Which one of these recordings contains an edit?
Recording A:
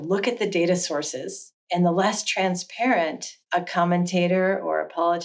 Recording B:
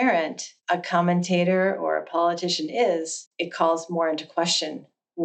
A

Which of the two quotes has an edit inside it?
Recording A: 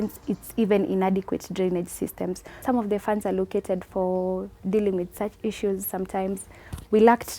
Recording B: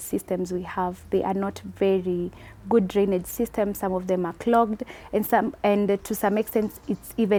A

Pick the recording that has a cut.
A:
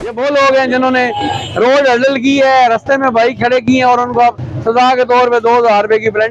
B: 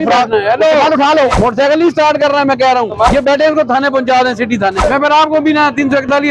B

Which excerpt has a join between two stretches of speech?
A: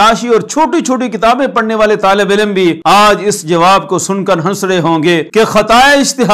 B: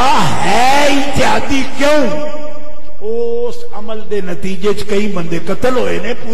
A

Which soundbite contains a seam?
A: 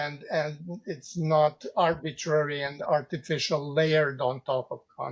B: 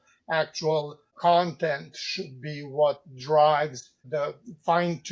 B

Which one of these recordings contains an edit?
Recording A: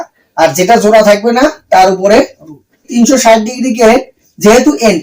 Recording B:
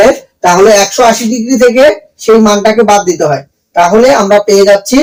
A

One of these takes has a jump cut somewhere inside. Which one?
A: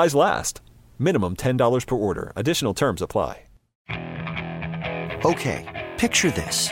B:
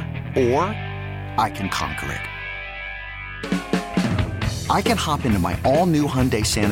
A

